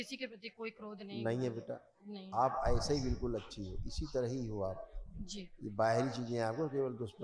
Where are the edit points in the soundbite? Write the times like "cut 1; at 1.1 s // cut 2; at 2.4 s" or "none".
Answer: none